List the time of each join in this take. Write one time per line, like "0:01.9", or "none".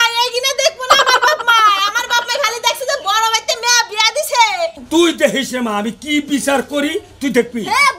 0:04.8